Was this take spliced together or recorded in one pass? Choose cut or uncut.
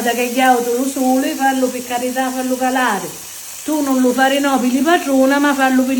uncut